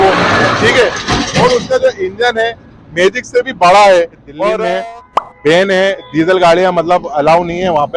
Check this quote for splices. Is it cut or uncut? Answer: cut